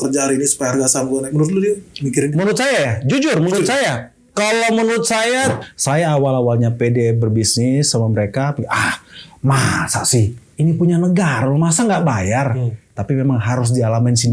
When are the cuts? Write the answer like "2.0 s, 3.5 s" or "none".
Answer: 5.6 s

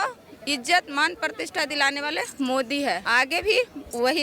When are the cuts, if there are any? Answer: 3.0 s

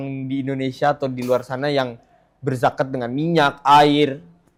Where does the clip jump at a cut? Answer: none

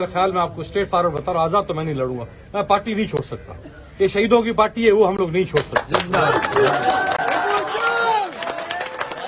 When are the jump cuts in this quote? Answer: none

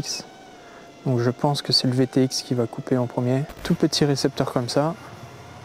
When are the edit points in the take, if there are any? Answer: 3.5 s

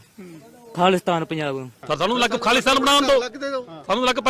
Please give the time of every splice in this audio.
1.7 s

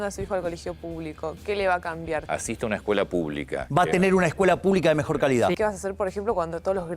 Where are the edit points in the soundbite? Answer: 2.2 s, 3.6 s, 5.6 s

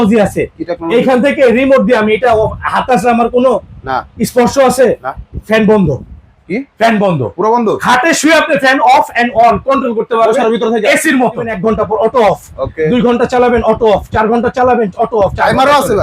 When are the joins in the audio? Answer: 11.5 s

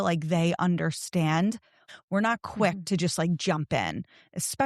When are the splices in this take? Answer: 1.9 s

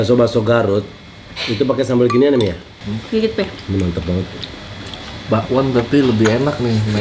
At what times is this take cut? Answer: none

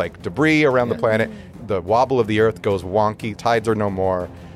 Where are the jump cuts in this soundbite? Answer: 1.5 s, 3.3 s

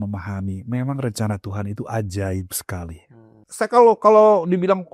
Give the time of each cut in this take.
3.4 s

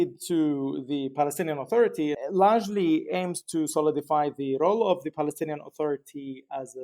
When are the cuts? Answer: 2.2 s

